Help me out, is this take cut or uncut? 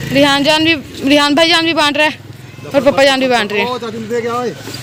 uncut